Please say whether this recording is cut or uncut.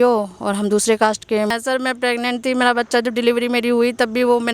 cut